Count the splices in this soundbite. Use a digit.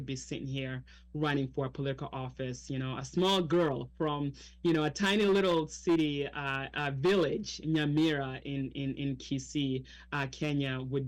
0